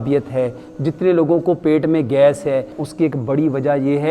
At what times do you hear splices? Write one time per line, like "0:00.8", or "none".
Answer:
0:02.8